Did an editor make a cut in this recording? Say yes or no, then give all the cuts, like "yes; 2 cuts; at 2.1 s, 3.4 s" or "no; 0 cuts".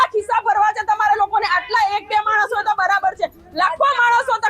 no; 0 cuts